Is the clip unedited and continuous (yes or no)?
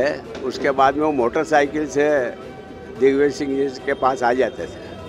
yes